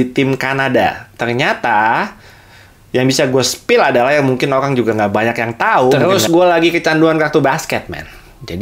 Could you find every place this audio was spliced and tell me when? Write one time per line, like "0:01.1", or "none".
0:06.0